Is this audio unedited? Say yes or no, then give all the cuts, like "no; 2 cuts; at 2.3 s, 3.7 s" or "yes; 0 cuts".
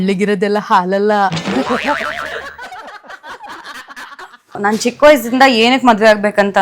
no; 1 cut; at 4.5 s